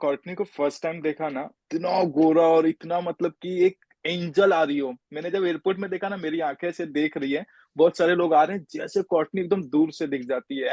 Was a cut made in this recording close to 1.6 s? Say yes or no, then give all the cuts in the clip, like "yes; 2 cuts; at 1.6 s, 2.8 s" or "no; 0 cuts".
yes; 1 cut; at 1.6 s